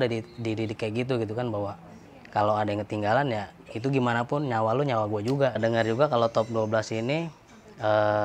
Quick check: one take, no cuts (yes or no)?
no